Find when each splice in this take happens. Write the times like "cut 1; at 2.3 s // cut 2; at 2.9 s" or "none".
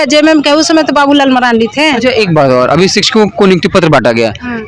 none